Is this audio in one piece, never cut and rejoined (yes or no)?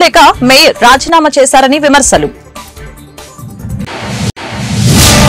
no